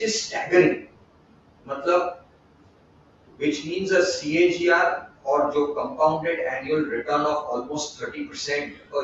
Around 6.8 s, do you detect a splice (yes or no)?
no